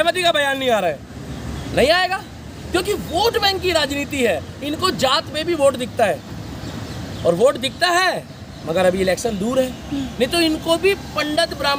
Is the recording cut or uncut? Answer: uncut